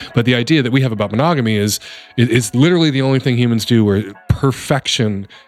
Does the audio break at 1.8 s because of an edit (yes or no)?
no